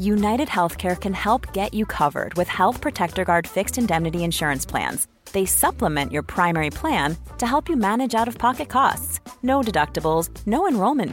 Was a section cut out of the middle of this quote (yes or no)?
no